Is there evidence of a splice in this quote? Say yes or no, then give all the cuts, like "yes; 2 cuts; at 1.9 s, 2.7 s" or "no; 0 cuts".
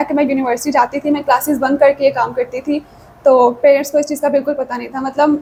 no; 0 cuts